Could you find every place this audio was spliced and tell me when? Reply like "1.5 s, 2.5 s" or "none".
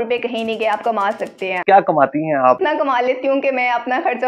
1.6 s, 2.6 s